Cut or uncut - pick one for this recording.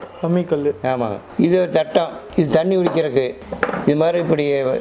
cut